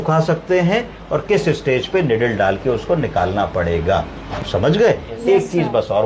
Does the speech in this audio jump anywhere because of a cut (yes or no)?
no